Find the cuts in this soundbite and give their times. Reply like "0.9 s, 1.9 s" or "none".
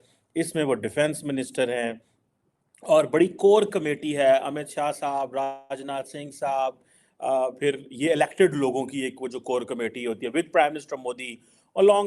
none

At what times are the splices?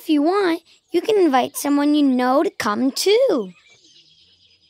3.7 s

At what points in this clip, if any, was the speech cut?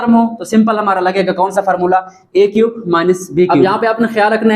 3.6 s

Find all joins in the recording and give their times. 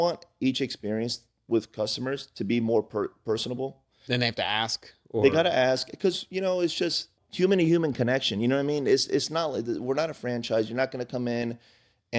7.2 s

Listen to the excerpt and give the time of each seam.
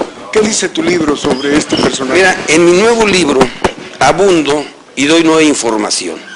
2.6 s

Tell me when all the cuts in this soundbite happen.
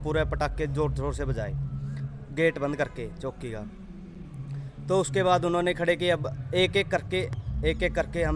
none

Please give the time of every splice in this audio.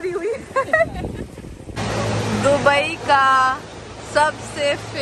1.8 s

